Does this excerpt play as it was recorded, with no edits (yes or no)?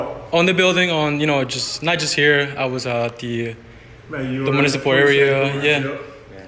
yes